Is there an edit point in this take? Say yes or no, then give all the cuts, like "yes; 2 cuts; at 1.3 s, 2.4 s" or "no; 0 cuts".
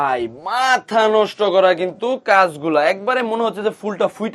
no; 0 cuts